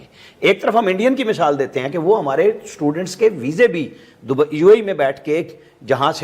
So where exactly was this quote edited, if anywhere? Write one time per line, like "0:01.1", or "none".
none